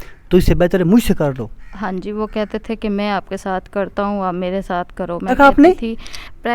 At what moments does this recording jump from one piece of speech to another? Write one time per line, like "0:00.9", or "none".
0:05.3